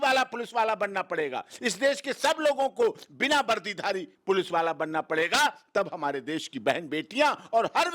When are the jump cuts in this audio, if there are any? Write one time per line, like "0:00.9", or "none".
none